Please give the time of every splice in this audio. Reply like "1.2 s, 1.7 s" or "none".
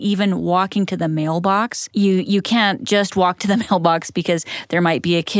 1.8 s